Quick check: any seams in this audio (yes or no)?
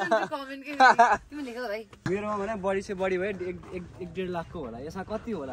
yes